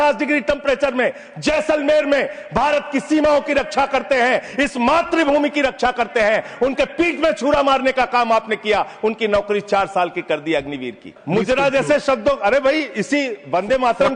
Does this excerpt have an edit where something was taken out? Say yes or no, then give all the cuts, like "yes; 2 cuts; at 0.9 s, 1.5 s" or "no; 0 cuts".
yes; 1 cut; at 11.1 s